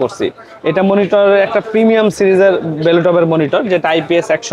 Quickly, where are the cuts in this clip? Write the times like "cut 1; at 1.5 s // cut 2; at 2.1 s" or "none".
none

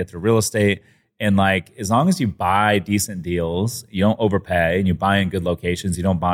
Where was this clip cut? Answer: none

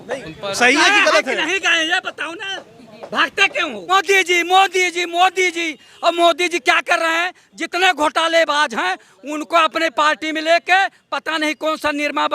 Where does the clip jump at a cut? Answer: cut 1; at 3.9 s

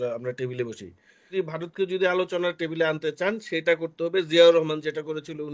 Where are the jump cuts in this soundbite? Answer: cut 1; at 1.3 s

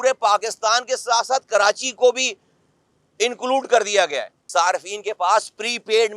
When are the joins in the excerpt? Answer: cut 1; at 4.3 s

